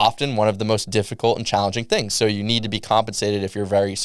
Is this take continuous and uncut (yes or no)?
yes